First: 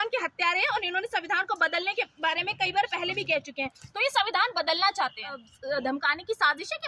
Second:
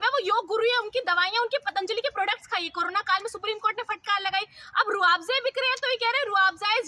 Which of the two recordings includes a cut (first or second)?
first